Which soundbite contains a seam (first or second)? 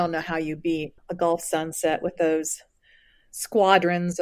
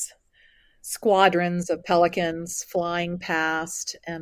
first